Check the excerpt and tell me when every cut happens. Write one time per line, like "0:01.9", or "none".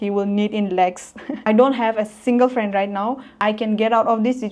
0:01.3
0:03.4

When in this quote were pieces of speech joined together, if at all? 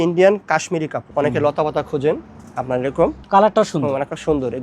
0:01.1

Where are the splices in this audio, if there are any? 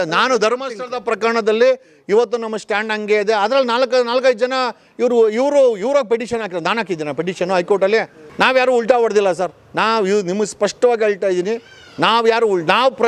0:08.2

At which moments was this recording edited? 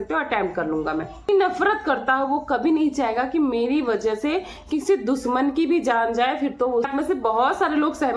0:01.3
0:06.9

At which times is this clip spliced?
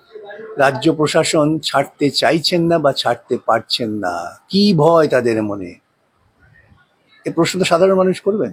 none

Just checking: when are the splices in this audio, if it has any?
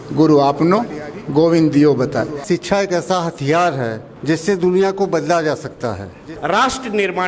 0:02.4
0:04.1
0:06.3

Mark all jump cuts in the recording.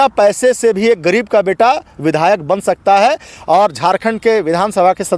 none

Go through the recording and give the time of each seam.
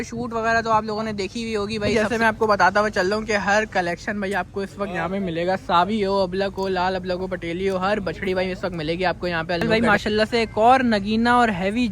0:01.9
0:09.6

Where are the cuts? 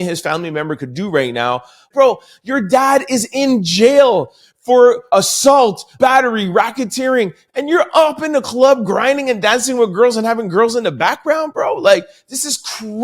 0:01.9
0:05.0
0:05.9

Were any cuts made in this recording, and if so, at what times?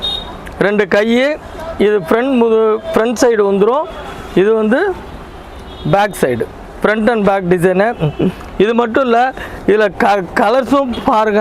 none

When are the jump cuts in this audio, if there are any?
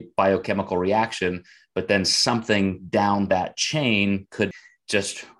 0:04.5

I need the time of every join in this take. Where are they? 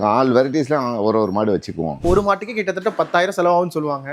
0:02.0

